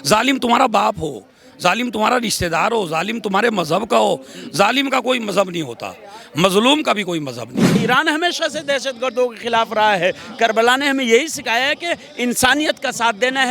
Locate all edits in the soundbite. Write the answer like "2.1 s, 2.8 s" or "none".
7.8 s